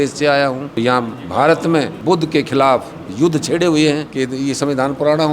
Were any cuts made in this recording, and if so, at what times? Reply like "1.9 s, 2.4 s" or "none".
0.8 s, 1.9 s, 4.1 s